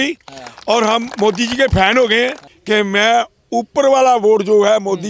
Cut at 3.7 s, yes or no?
no